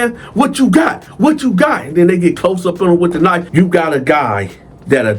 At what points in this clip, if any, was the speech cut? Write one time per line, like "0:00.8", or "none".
0:03.4